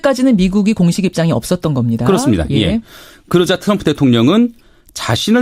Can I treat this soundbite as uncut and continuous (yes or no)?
no